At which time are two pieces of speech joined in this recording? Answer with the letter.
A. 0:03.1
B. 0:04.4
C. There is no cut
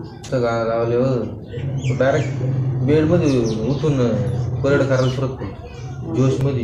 C